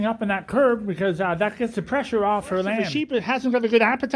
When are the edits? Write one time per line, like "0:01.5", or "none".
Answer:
0:03.0